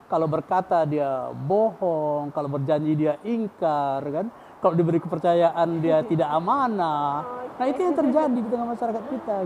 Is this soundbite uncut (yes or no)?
yes